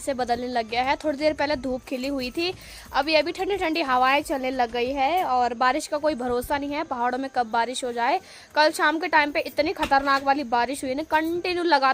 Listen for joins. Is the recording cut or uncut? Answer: uncut